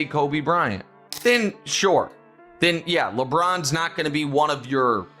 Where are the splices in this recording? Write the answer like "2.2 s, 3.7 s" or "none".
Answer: 1.1 s